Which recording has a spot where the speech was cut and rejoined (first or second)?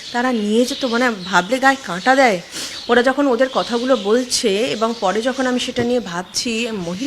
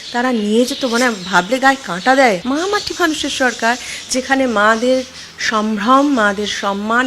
second